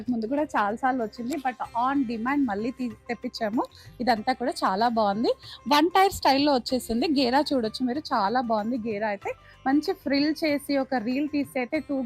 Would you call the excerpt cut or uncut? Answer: uncut